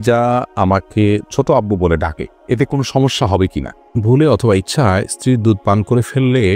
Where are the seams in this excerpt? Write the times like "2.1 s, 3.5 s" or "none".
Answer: 4.0 s